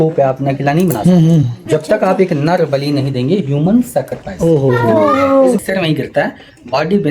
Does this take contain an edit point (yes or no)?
yes